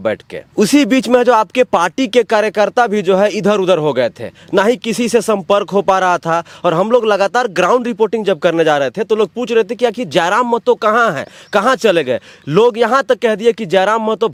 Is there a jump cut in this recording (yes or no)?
no